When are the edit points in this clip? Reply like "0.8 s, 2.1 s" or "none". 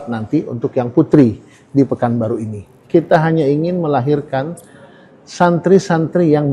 2.7 s